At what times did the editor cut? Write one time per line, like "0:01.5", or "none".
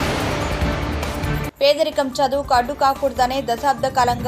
0:01.2